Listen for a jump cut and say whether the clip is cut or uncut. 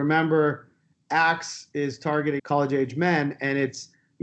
cut